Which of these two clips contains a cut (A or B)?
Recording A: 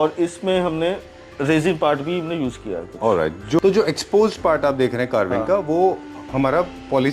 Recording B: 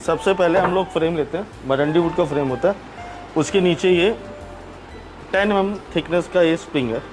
A